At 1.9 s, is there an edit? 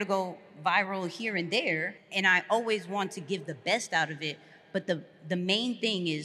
yes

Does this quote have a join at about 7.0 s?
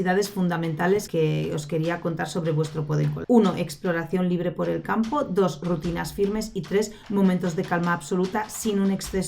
no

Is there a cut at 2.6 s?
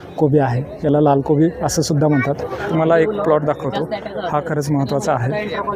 yes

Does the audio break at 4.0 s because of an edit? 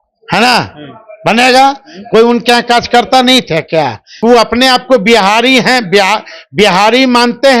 yes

